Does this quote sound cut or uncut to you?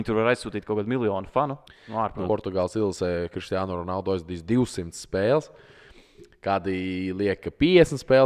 cut